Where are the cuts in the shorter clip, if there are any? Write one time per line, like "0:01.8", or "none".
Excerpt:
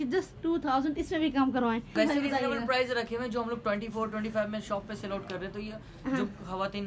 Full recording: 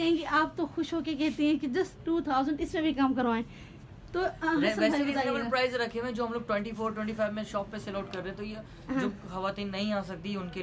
0:01.9